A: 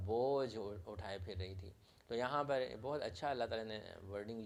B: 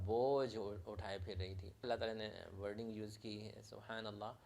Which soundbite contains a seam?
B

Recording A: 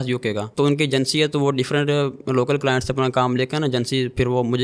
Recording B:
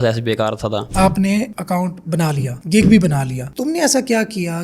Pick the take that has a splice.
B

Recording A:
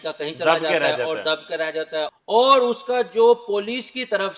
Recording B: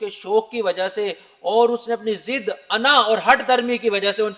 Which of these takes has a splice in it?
A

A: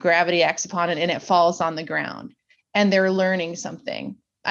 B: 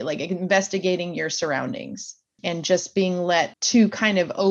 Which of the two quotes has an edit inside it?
B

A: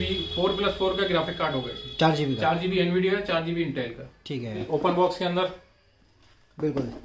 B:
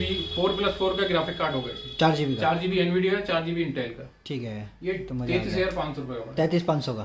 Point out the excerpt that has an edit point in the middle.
A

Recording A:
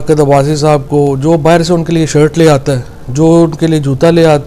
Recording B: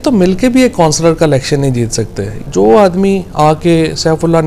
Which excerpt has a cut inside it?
B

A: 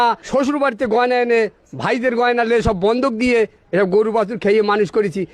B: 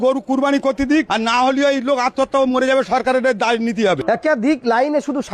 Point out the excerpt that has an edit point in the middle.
B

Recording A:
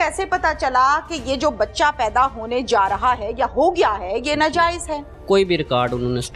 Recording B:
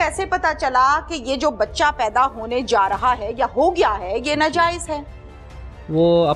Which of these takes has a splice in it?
A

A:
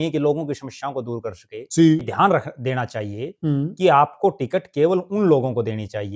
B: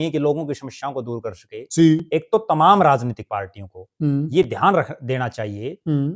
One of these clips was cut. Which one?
A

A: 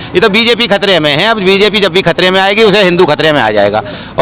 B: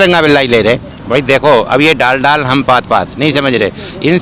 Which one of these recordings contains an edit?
B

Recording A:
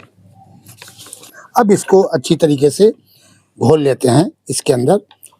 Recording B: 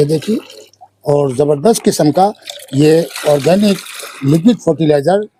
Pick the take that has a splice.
A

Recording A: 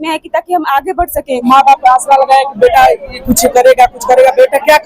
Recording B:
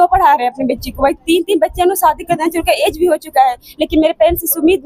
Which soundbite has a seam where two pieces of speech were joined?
A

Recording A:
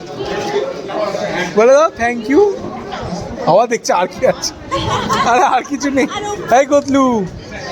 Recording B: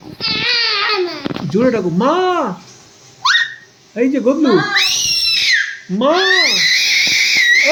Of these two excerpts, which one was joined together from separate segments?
A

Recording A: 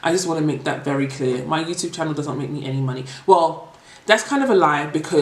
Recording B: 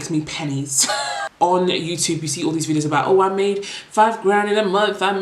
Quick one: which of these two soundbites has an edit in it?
B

